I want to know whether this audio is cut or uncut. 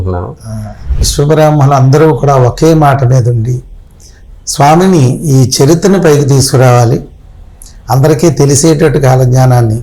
cut